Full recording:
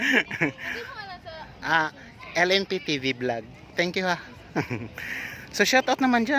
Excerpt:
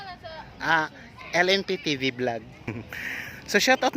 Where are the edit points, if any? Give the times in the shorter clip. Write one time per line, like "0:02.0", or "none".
0:02.7